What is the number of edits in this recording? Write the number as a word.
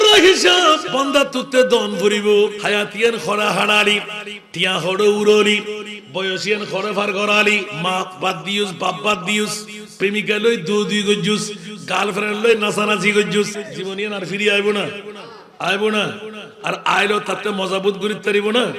four